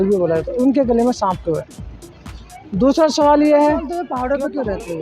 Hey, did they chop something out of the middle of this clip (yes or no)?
yes